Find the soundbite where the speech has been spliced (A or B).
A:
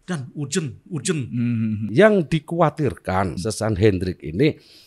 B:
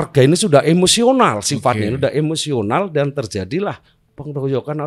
A